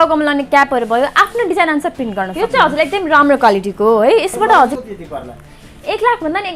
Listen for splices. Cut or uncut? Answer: cut